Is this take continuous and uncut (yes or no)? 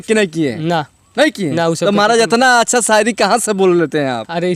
yes